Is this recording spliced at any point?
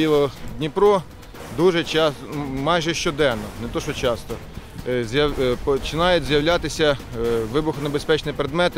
no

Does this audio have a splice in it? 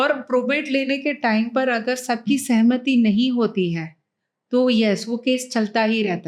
no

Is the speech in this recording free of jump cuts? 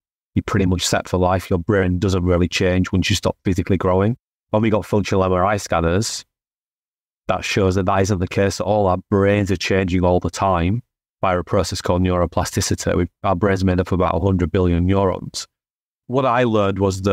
no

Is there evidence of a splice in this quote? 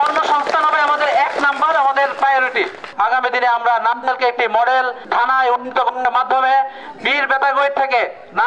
yes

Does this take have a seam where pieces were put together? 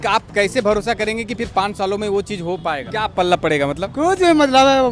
yes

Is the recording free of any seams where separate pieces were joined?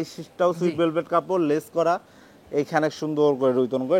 yes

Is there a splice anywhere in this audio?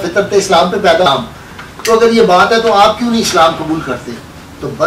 yes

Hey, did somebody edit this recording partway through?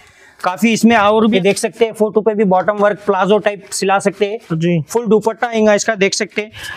yes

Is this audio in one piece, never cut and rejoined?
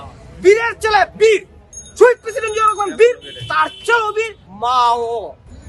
no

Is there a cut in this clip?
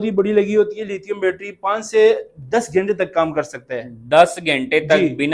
no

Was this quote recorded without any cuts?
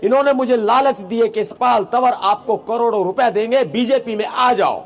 no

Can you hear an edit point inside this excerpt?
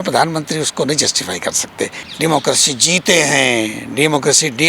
yes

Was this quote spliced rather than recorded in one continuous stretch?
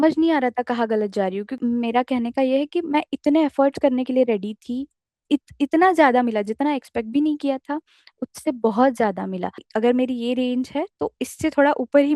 yes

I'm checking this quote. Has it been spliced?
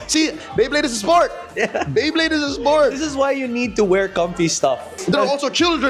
yes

